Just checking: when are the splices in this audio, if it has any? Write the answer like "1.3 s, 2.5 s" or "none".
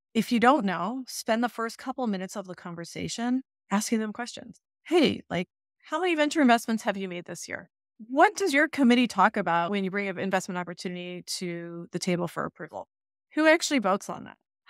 3.6 s